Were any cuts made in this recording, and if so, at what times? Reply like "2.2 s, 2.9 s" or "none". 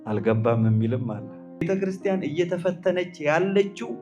1.6 s